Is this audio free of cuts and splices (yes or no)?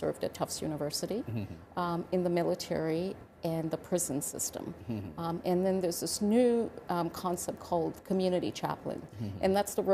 yes